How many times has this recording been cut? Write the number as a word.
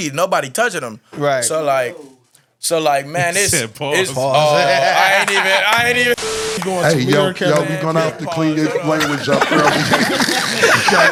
zero